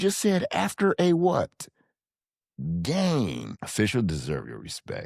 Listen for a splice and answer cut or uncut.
cut